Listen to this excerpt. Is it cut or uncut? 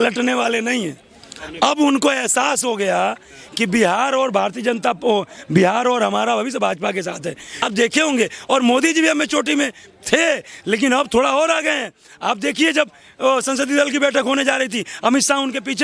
cut